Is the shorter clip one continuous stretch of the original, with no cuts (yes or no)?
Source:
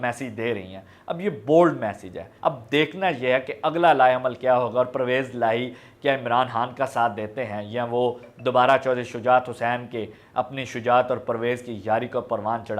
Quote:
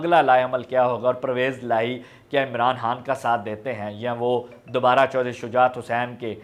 yes